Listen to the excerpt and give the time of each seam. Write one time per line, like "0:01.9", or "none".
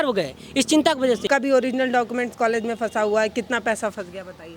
0:01.2